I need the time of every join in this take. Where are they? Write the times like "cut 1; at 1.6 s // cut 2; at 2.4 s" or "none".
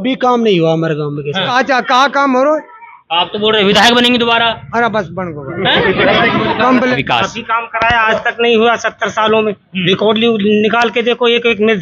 cut 1; at 1.5 s // cut 2; at 6.9 s